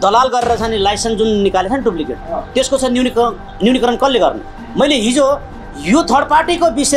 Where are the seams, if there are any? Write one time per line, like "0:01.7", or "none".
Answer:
none